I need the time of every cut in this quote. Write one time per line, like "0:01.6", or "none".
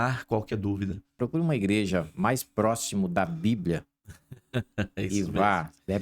0:01.2